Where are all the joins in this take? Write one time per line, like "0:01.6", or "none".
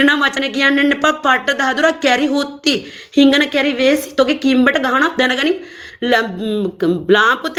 none